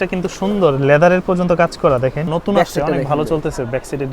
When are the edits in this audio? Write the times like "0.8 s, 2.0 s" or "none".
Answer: 2.3 s